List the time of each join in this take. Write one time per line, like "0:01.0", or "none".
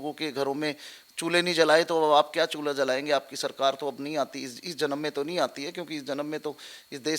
none